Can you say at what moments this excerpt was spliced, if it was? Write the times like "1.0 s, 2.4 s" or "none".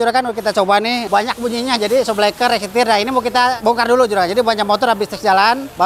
1.0 s